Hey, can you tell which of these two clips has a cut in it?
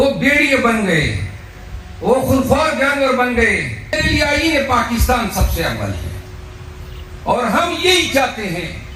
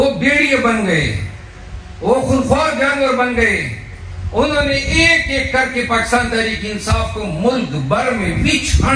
first; 1 cut; at 4.0 s

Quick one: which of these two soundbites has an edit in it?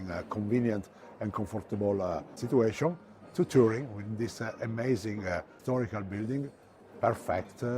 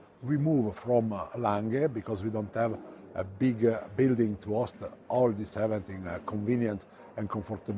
first; 1 cut; at 5.5 s

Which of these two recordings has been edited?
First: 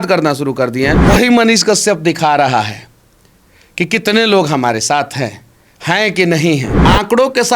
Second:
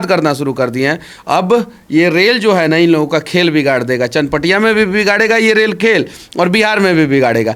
first; 2 cuts; at 1.0 s, 6.7 s

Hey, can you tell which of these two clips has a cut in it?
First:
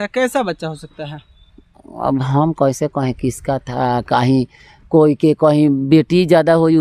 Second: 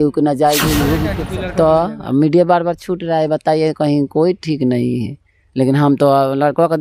second; 1 cut; at 1.1 s

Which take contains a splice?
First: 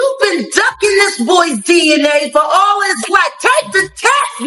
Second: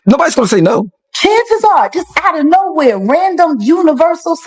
second; 1 cut; at 1.1 s

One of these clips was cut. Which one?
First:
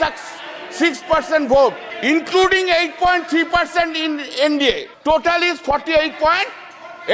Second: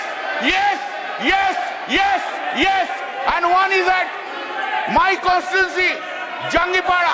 first; 2 cuts; at 1.9 s, 4.9 s

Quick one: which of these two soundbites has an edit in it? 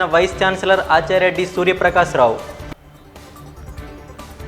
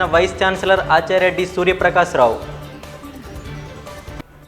second; 1 cut; at 2.4 s

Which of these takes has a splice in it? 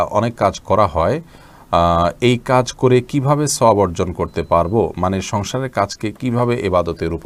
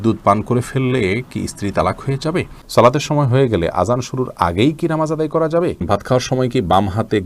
second; 2 cuts; at 2.6 s, 5.8 s

